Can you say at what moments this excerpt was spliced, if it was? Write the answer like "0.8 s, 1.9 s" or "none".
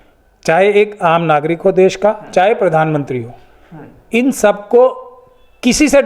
none